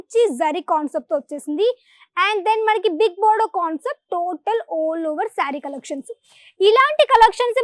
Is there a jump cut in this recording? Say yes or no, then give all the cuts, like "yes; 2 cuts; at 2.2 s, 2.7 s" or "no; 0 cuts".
no; 0 cuts